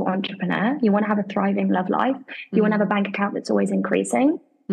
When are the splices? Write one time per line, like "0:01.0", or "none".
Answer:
none